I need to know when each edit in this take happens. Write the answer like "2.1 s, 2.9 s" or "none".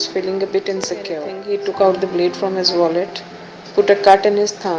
1.3 s